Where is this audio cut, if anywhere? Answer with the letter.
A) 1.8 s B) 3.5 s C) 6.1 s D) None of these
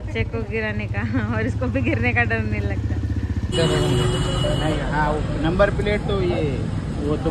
B